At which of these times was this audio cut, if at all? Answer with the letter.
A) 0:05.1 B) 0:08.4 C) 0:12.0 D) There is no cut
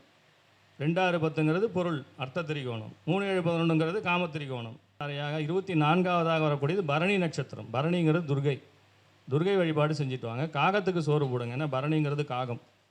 A